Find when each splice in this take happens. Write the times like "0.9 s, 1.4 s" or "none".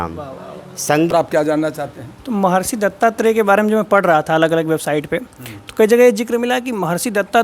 1.1 s